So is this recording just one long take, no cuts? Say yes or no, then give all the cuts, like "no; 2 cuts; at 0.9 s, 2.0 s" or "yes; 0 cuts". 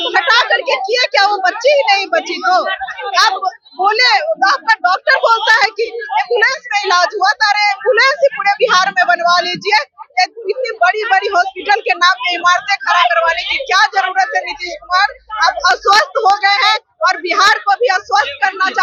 yes; 0 cuts